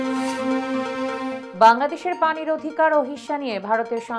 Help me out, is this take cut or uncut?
uncut